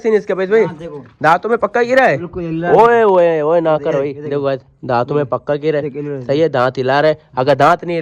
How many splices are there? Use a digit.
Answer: 0